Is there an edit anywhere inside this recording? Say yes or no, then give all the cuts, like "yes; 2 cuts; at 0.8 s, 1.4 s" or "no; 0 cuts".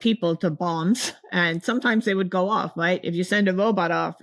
no; 0 cuts